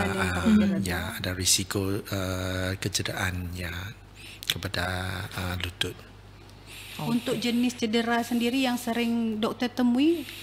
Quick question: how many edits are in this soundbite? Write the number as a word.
zero